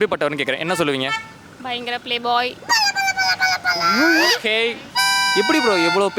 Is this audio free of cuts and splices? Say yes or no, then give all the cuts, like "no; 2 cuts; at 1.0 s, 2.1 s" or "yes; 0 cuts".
no; 1 cut; at 4.9 s